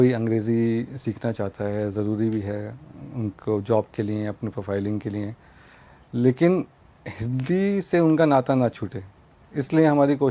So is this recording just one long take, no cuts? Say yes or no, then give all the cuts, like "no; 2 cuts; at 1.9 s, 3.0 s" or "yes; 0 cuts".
yes; 0 cuts